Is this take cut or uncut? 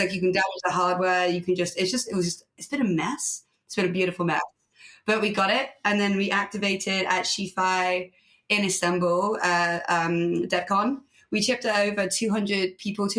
uncut